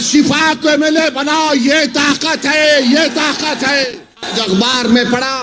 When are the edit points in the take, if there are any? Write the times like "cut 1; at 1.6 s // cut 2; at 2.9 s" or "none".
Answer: cut 1; at 4.3 s